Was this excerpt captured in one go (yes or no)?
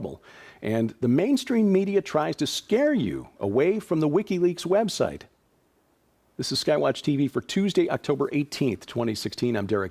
no